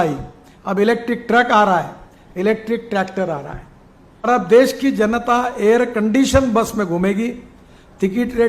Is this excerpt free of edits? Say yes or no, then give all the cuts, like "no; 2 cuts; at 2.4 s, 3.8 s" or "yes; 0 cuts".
no; 1 cut; at 4.3 s